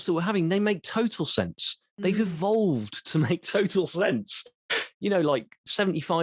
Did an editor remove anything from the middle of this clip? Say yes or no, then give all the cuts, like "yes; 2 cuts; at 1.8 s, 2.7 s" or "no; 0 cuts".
no; 0 cuts